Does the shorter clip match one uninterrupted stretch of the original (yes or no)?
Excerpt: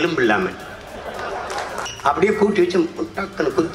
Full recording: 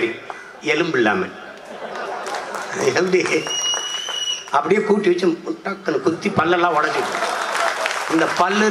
no